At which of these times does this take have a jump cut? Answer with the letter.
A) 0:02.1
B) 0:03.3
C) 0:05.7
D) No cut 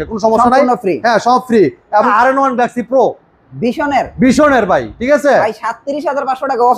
A